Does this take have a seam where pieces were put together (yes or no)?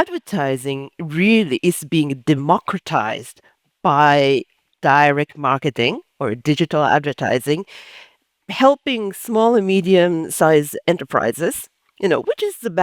yes